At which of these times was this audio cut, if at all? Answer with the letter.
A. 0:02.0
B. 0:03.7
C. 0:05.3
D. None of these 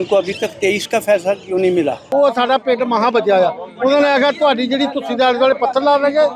A